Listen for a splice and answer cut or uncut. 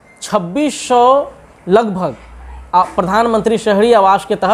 uncut